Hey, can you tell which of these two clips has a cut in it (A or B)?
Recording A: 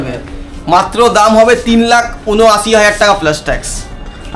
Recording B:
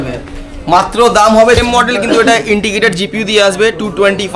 B